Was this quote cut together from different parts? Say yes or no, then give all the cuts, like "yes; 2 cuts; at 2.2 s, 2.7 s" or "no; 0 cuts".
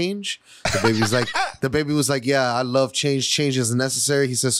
no; 0 cuts